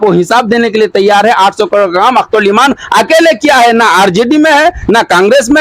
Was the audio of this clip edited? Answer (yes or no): no